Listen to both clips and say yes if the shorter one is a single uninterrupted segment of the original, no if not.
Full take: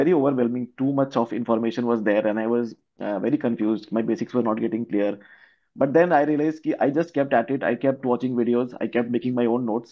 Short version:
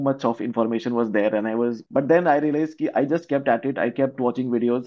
no